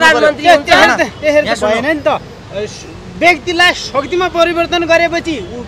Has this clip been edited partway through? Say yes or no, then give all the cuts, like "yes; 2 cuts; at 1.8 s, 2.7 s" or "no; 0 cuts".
no; 0 cuts